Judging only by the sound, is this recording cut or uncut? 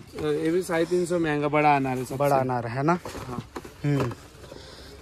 uncut